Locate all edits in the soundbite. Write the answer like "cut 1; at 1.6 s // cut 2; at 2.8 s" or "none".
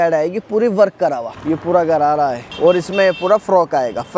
cut 1; at 1.3 s // cut 2; at 2.5 s